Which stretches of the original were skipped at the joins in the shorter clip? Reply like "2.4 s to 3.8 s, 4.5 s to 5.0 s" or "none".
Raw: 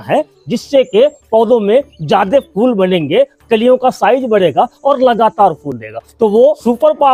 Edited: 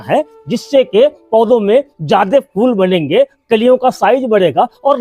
none

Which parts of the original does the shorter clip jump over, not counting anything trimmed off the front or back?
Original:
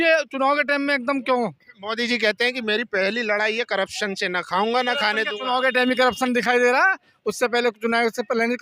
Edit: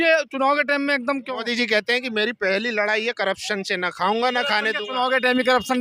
1.2 s to 1.7 s

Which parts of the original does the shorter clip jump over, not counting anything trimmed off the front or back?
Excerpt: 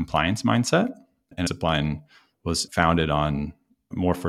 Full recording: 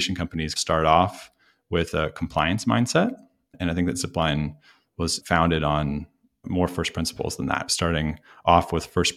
3.7 s to 4.0 s

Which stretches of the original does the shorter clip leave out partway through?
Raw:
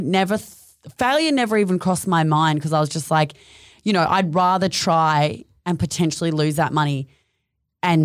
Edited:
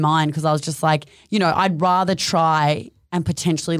3.4 s to 3.7 s

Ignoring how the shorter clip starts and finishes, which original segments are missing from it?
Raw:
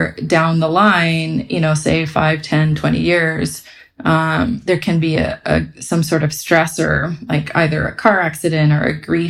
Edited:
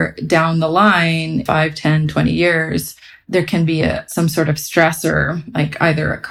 1.4 s to 2.1 s, 3.9 s to 4.6 s, 5.4 s to 5.8 s

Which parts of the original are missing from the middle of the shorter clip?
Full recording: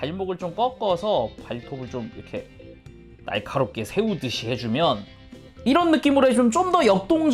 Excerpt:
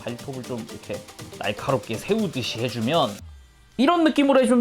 2.6 s to 3.0 s

